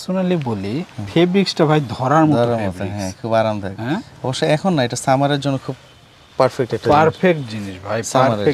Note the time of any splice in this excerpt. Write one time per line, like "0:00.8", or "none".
none